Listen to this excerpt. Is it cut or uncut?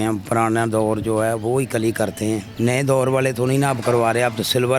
cut